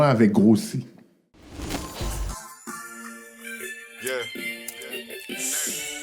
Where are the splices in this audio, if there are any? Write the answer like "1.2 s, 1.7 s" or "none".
1.5 s